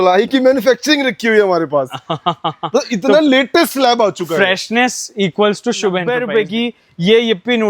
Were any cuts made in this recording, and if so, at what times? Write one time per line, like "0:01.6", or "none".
0:06.2